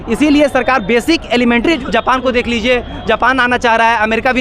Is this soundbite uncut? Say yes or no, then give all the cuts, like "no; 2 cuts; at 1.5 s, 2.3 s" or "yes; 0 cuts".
no; 1 cut; at 1.8 s